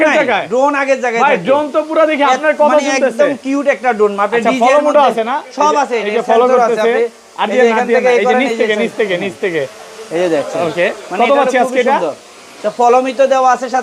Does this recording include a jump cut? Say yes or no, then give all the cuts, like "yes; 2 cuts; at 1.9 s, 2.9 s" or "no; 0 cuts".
no; 0 cuts